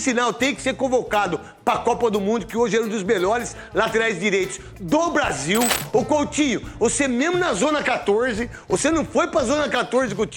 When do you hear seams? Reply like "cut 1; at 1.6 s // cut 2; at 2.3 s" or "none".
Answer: cut 1; at 5.8 s